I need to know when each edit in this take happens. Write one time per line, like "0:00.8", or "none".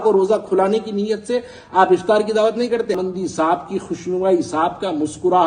0:03.0